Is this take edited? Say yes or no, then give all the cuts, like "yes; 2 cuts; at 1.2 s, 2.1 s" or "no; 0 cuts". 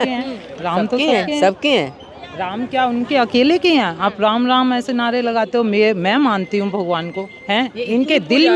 no; 0 cuts